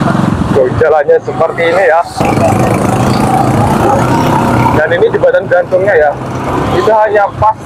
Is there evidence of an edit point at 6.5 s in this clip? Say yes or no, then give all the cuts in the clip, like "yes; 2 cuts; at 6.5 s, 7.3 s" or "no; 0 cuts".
no; 1 cut; at 2.2 s